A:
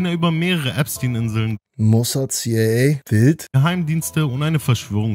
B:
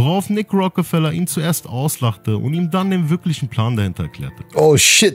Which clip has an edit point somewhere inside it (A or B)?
A